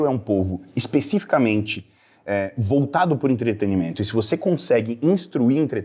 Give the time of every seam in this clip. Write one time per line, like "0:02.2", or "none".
none